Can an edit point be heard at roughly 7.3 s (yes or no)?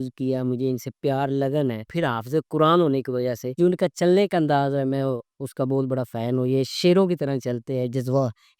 no